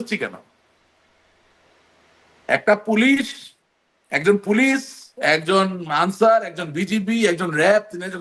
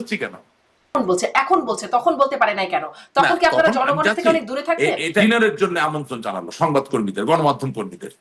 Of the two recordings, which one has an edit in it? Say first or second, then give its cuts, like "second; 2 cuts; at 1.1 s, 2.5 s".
second; 2 cuts; at 0.9 s, 5.2 s